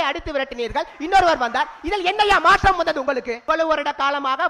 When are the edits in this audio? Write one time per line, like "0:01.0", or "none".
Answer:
0:03.3